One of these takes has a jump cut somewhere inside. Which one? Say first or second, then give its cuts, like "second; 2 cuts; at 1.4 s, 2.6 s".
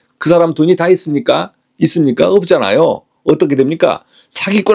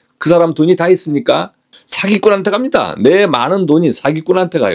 second; 1 cut; at 1.6 s